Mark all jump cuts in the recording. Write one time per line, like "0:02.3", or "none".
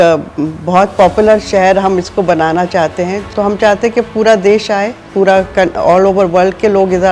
0:03.2